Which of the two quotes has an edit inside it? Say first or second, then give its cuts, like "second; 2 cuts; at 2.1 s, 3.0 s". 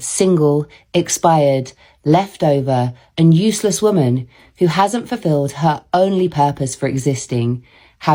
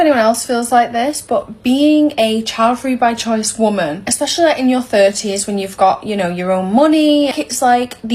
second; 2 cuts; at 4.0 s, 7.3 s